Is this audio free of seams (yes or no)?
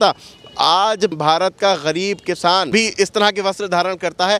no